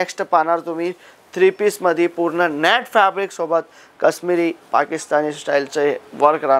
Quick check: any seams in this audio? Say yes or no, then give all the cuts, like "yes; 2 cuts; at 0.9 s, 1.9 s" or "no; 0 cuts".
no; 0 cuts